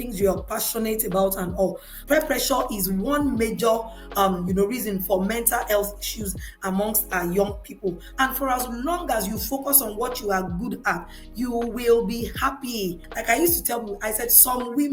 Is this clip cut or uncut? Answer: cut